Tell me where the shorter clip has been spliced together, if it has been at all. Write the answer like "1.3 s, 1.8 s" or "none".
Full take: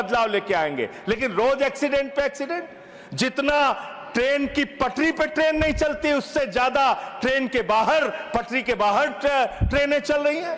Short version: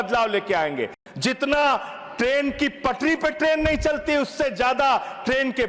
1.0 s